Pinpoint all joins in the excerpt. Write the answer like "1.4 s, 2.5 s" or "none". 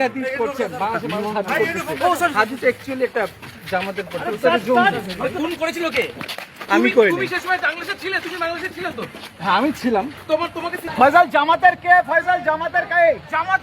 10.8 s